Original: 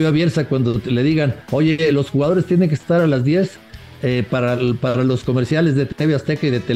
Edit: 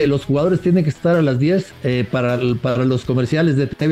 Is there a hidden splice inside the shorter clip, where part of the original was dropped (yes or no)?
yes